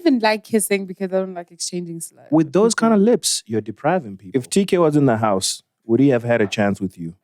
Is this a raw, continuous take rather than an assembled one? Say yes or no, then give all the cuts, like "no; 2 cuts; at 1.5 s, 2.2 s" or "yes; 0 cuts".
no; 1 cut; at 4.2 s